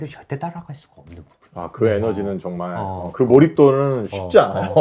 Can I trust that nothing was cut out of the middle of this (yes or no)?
yes